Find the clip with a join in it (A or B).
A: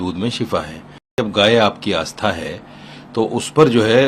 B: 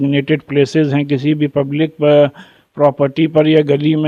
A